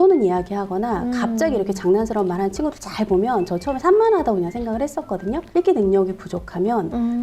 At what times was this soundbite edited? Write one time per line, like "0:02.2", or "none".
0:05.4